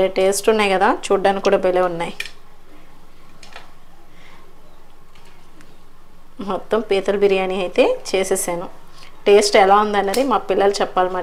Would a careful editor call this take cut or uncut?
uncut